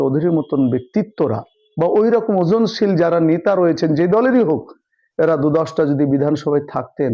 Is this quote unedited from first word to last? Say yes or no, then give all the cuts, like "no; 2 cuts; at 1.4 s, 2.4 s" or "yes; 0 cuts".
yes; 0 cuts